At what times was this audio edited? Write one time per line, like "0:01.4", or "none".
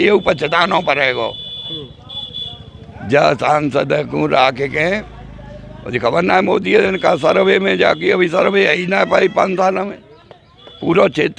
none